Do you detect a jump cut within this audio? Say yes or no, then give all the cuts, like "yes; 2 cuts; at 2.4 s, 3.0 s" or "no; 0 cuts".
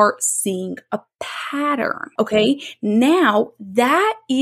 yes; 1 cut; at 2.3 s